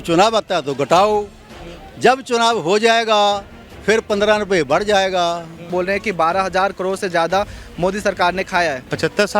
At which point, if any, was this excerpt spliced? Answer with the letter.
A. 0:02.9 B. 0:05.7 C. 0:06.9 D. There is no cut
B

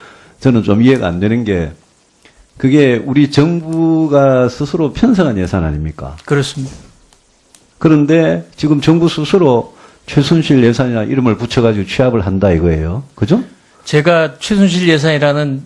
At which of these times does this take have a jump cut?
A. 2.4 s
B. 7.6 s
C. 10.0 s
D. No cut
D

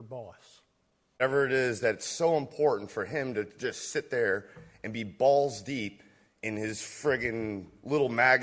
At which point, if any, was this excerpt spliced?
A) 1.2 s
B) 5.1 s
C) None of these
A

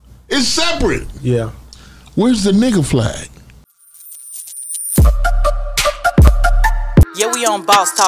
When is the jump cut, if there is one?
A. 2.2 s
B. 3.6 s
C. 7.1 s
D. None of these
B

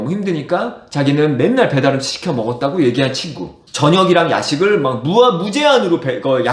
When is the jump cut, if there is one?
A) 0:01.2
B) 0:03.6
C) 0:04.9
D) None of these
B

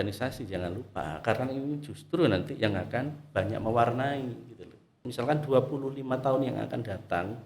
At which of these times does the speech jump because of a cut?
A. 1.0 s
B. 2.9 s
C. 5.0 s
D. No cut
C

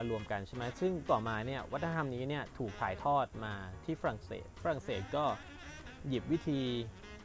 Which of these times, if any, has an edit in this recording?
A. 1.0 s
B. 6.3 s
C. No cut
A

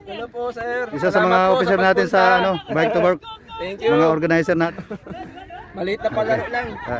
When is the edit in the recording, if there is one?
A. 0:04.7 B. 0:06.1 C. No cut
A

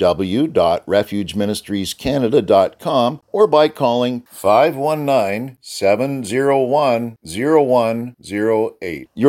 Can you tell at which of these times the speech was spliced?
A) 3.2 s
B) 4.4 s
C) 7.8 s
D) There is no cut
A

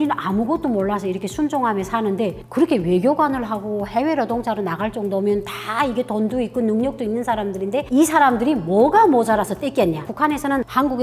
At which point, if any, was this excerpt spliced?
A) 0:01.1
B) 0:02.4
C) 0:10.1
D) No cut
C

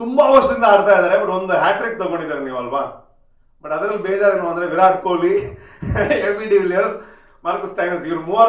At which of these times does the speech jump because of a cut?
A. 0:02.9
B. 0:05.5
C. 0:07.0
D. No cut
D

